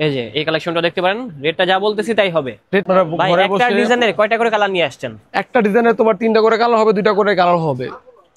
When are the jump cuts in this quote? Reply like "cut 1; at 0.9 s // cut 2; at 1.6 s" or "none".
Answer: cut 1; at 2.9 s